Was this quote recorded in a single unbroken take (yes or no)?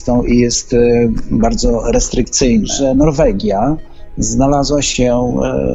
no